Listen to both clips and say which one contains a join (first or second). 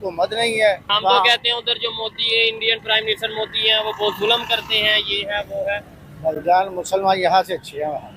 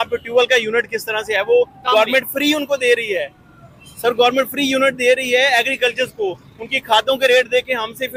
first